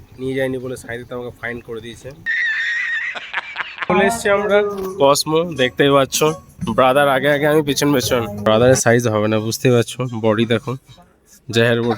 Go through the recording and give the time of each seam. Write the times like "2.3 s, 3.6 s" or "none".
3.9 s, 8.4 s